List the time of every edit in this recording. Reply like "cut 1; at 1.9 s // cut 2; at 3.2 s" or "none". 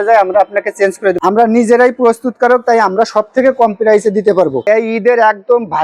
cut 1; at 1.2 s // cut 2; at 4.6 s